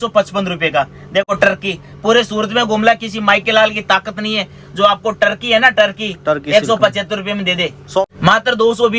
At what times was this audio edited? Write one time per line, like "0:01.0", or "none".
0:01.2
0:08.0